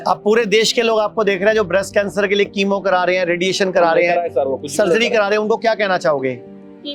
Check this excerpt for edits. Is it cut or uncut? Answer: uncut